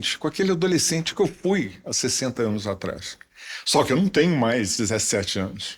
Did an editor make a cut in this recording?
no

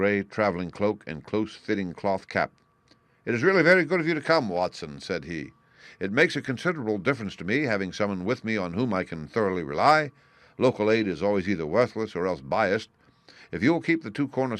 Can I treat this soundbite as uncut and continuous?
no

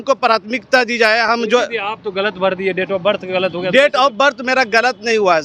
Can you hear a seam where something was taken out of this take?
no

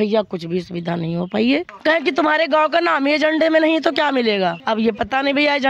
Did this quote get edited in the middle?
yes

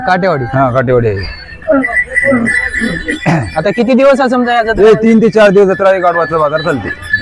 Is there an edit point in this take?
no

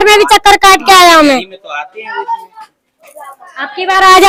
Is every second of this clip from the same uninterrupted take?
yes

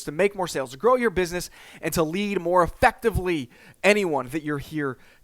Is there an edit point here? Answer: no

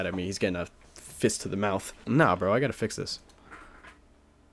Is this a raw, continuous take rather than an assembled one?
yes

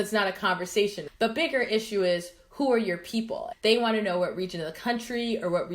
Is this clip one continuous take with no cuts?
no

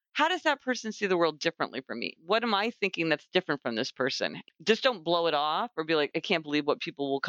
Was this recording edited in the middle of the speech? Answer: yes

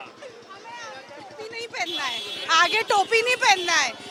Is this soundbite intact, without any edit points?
yes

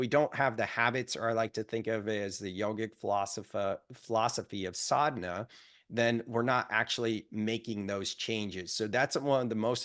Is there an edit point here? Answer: no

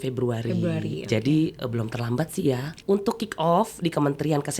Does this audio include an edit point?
yes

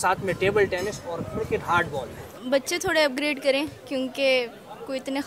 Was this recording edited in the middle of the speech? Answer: yes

